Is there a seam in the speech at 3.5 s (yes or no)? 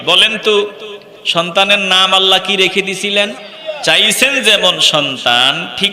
yes